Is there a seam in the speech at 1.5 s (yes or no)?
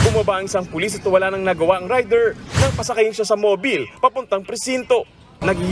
yes